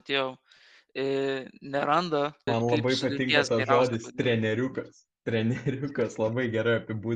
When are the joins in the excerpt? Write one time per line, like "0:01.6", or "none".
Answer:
0:02.5

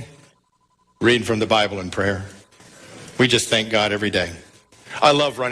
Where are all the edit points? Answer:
none

